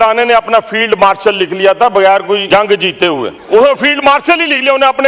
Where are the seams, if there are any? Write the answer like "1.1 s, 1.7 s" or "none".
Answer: 2.4 s, 3.4 s